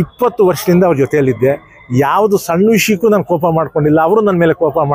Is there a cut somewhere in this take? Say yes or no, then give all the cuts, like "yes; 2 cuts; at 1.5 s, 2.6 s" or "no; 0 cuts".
no; 0 cuts